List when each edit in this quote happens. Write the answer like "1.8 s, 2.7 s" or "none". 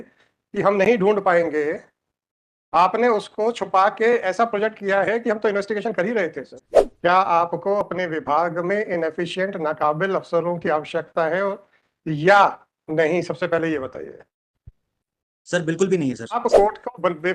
6.5 s, 16.4 s